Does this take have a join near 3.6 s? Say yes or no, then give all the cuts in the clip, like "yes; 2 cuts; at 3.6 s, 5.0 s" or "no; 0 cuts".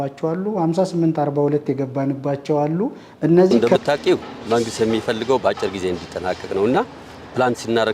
yes; 1 cut; at 3.6 s